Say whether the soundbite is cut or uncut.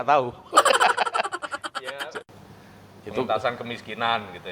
cut